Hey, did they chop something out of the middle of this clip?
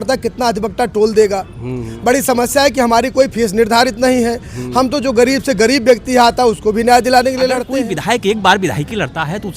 yes; 1 cut; at 7.7 s

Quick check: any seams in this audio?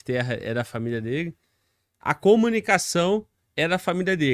no; 0 cuts

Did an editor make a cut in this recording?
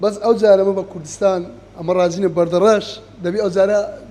no; 0 cuts

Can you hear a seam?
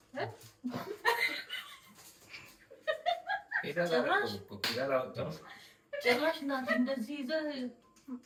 no; 0 cuts

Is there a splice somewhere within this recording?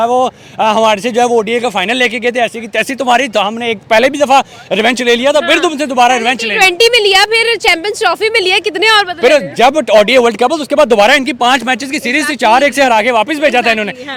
no; 0 cuts

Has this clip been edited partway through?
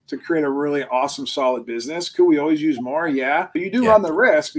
yes; 1 cut; at 3.6 s

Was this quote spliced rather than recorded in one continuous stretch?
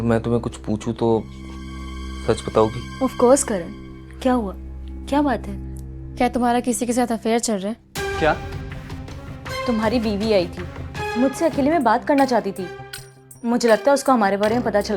yes; 1 cut; at 9.6 s

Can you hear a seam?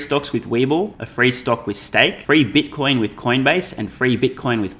yes; 2 cuts; at 1.0 s, 2.2 s

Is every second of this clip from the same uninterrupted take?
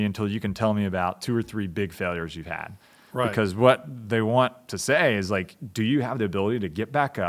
yes; 0 cuts

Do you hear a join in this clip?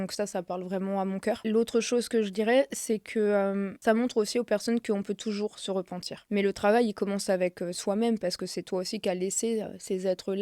yes; 3 cuts; at 1.4 s, 3.7 s, 6.1 s

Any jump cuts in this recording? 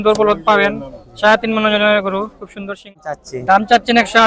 yes; 1 cut; at 2.9 s

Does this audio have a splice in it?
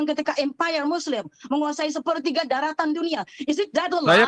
no; 0 cuts

